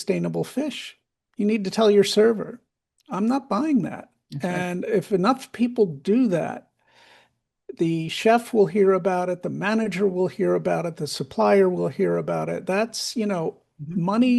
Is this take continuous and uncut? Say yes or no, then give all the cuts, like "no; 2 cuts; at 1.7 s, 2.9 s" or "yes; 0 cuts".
yes; 0 cuts